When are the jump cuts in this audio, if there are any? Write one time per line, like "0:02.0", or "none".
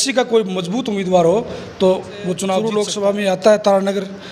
0:02.7

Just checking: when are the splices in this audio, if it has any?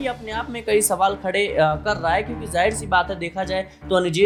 none

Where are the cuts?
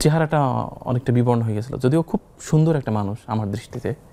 none

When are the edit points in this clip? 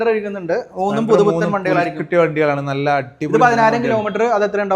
none

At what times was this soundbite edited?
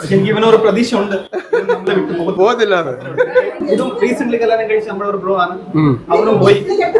0:03.5

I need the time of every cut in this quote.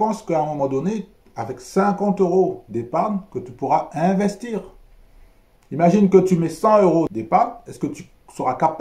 0:07.1

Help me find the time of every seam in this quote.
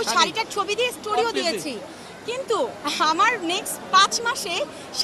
none

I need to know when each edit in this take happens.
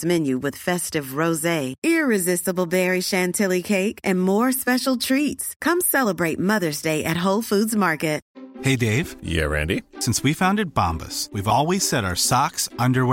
0:08.2

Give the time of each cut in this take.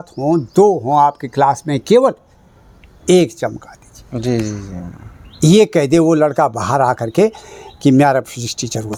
none

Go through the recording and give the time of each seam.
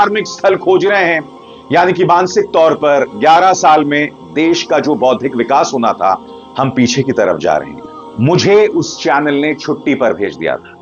0:07.7

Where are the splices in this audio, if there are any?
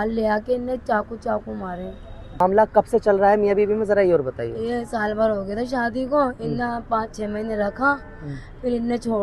none

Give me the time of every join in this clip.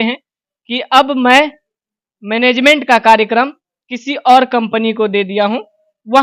none

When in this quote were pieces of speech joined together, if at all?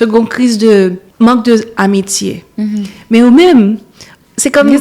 0:01.0

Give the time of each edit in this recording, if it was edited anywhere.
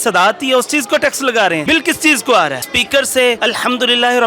0:01.6
0:02.7
0:03.4

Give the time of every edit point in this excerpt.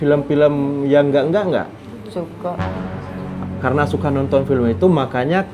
none

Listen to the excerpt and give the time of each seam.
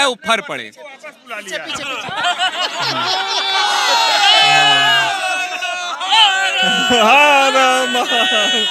none

